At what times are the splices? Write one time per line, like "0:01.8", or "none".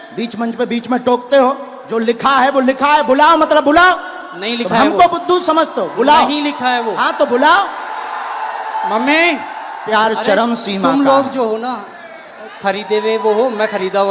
0:09.9